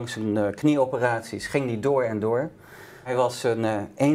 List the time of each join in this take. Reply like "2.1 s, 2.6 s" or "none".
3.1 s